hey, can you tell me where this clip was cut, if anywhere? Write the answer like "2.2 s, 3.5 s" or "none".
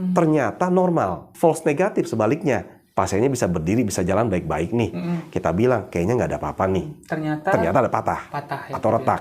1.2 s